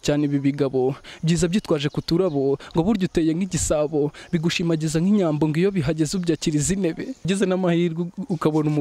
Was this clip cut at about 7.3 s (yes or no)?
yes